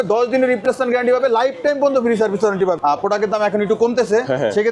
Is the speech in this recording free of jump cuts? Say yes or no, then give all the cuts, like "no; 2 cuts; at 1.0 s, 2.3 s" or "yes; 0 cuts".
no; 1 cut; at 2.8 s